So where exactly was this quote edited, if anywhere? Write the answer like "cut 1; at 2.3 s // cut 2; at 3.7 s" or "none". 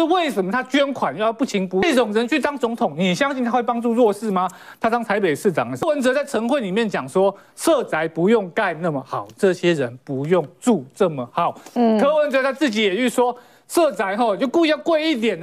cut 1; at 1.8 s // cut 2; at 5.8 s